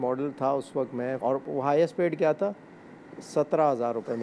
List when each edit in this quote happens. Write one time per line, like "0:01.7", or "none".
0:01.2